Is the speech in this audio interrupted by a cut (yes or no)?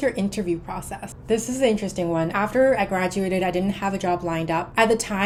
no